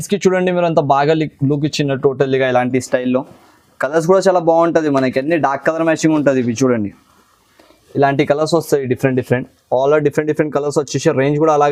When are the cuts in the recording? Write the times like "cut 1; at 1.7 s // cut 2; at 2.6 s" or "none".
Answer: none